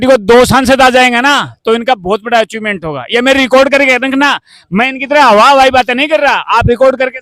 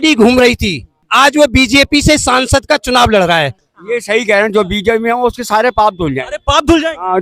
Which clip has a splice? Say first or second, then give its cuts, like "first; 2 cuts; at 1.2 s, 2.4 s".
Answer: second; 2 cuts; at 1.0 s, 3.6 s